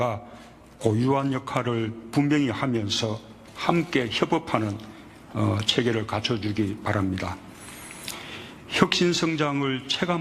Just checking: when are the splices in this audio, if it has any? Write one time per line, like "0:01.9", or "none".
0:04.3